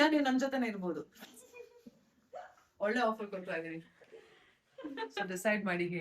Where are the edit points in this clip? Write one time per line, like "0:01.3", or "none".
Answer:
0:04.8